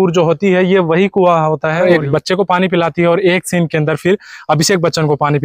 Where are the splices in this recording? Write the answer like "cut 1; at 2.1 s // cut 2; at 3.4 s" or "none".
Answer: cut 1; at 1.8 s